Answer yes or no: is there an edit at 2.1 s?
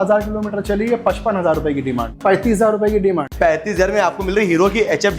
yes